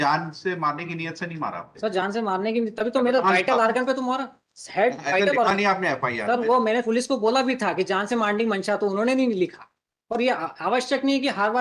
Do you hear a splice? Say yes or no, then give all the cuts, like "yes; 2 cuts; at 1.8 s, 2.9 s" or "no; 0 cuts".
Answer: no; 0 cuts